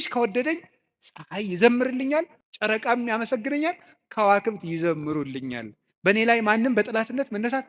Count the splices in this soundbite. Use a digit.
1